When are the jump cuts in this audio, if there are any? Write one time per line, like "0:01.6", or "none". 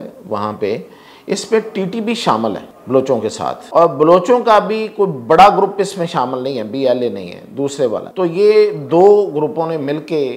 0:02.7
0:03.6
0:08.1